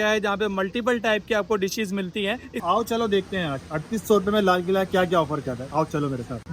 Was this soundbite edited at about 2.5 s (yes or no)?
yes